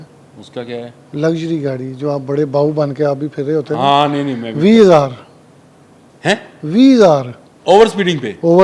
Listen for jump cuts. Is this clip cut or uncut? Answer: uncut